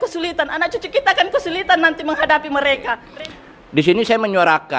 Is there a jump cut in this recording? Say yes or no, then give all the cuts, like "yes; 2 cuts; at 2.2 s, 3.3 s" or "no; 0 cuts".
yes; 1 cut; at 3.0 s